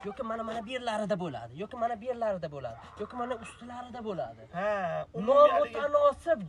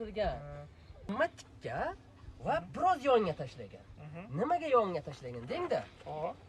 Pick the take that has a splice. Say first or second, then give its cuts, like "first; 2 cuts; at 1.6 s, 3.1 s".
second; 1 cut; at 1.1 s